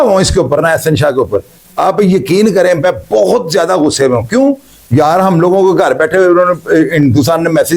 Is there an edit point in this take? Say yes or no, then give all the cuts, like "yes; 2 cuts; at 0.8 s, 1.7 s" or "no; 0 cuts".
no; 0 cuts